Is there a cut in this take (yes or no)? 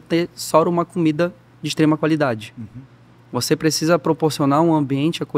no